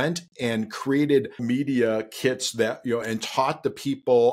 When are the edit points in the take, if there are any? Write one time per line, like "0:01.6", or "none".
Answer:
0:01.4